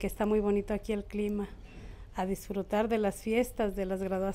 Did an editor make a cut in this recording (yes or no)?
no